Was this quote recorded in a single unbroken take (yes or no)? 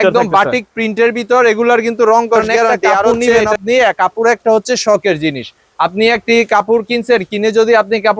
no